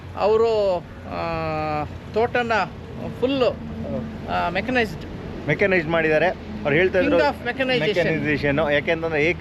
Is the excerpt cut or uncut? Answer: uncut